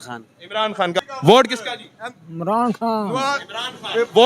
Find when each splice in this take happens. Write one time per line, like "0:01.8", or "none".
0:00.9